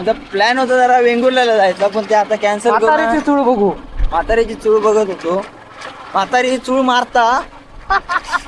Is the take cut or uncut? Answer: uncut